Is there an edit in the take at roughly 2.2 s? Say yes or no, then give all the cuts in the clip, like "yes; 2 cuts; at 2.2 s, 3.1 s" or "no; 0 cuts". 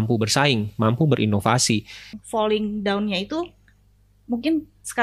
yes; 1 cut; at 2.2 s